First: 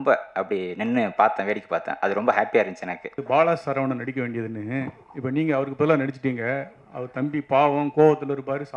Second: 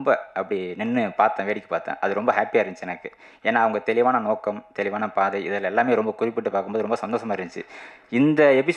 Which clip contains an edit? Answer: first; 1 cut; at 3.1 s

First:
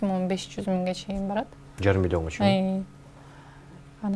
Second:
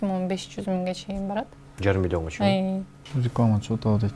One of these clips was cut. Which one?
second; 1 cut; at 3.0 s

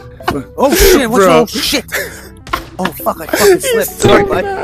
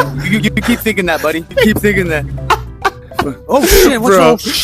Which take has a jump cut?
second; 1 cut; at 1.4 s

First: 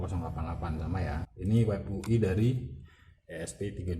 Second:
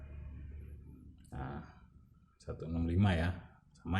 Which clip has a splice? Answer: first; 1 cut; at 1.3 s

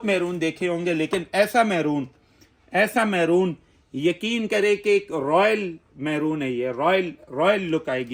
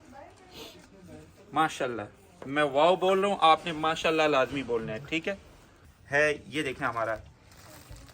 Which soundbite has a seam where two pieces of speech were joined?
second; 1 cut; at 5.7 s

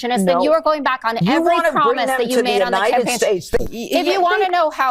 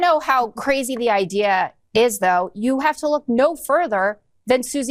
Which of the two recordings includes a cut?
first; 1 cut; at 3.6 s

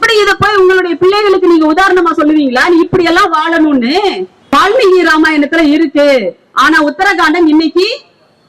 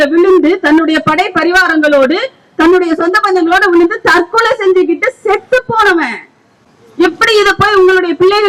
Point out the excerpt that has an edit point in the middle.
first; 1 cut; at 4.5 s

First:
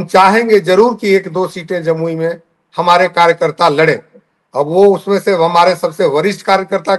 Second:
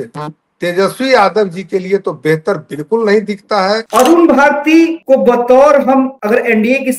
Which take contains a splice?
second; 3 cuts; at 3.8 s, 5.0 s, 6.2 s

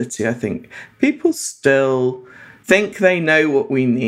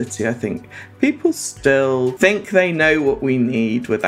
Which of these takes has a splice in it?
second; 1 cut; at 2.1 s

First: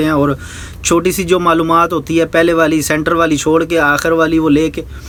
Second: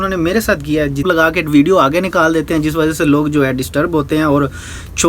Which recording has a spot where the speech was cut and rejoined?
second; 1 cut; at 1.0 s

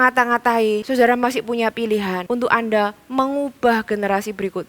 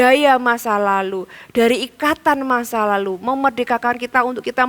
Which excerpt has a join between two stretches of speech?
first; 2 cuts; at 0.8 s, 2.2 s

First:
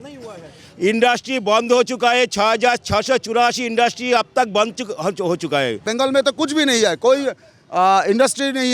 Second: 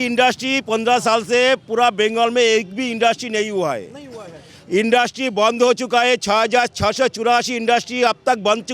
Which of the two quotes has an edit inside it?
first; 1 cut; at 5.9 s

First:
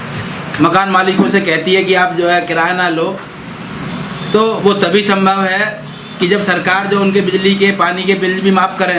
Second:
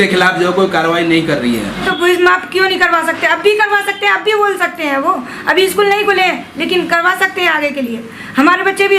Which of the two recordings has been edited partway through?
second; 1 cut; at 1.8 s

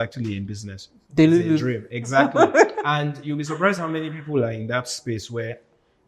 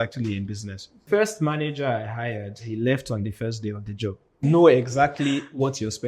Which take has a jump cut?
second; 2 cuts; at 1.0 s, 4.4 s

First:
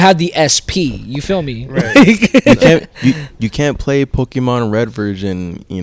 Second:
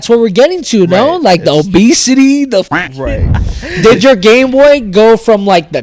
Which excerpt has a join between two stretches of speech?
second; 1 cut; at 3.0 s

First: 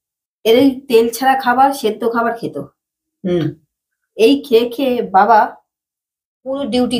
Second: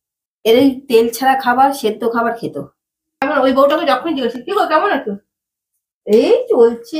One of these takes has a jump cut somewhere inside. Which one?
second; 1 cut; at 3.2 s

